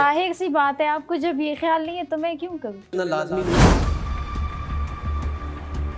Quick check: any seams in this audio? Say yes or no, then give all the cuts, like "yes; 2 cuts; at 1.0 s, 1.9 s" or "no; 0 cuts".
yes; 1 cut; at 2.9 s